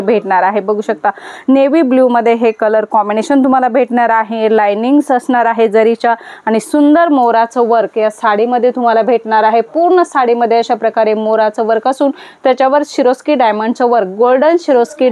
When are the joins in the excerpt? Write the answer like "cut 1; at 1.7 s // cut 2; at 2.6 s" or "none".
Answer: none